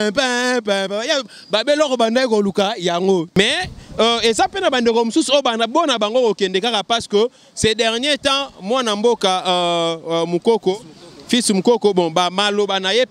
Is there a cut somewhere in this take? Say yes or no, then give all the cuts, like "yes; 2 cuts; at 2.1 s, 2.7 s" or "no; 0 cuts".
yes; 1 cut; at 3.4 s